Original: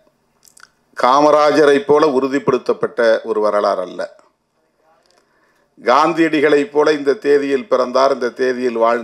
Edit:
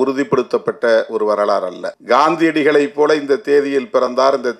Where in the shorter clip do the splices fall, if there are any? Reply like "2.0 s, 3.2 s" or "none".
1.9 s